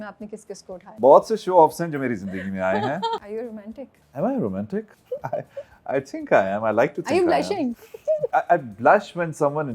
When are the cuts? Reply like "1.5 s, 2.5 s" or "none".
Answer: 0.9 s, 3.2 s, 5.0 s, 8.1 s